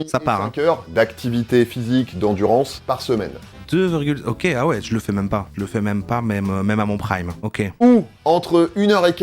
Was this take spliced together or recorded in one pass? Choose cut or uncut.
cut